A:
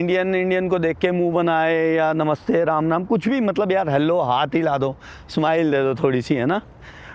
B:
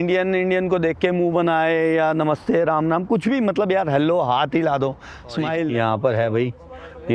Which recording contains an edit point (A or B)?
B